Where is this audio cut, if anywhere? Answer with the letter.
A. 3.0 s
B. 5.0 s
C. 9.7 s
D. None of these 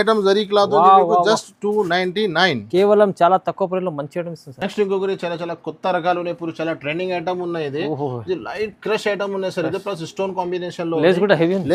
D